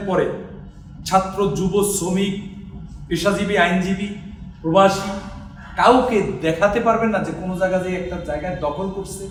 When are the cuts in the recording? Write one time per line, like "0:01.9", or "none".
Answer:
none